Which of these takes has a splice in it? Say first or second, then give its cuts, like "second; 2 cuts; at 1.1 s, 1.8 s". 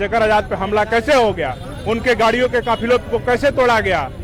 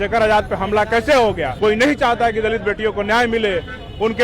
second; 1 cut; at 1.5 s